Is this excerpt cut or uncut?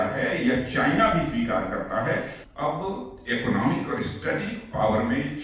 cut